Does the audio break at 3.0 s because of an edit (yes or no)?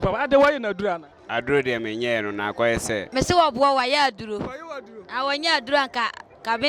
yes